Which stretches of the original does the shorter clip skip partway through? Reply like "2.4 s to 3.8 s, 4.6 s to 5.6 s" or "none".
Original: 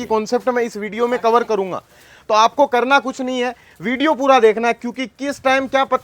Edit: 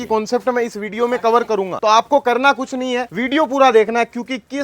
1.7 s to 2.2 s, 3.6 s to 3.8 s